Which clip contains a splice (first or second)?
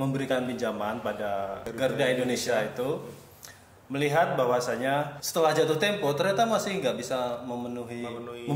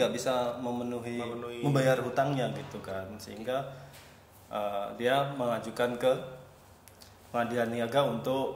first